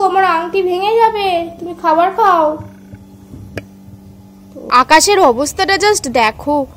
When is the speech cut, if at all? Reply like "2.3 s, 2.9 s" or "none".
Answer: 4.7 s